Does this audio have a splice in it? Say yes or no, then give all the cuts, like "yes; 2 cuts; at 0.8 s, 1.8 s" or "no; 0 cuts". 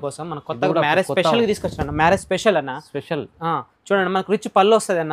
no; 0 cuts